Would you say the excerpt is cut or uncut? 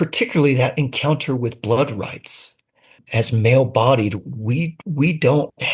uncut